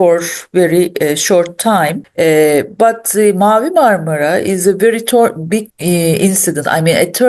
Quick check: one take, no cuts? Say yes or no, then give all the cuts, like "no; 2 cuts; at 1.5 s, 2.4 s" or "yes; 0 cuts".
no; 2 cuts; at 2.0 s, 5.7 s